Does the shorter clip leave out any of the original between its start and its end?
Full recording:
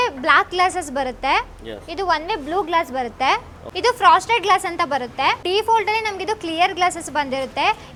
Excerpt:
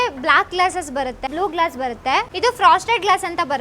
yes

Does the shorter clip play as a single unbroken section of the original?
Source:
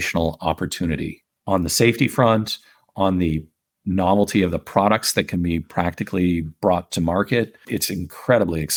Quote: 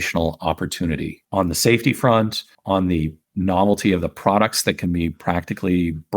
no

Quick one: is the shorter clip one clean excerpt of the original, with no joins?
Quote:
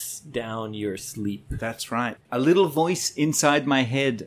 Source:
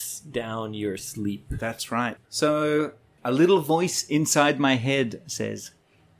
no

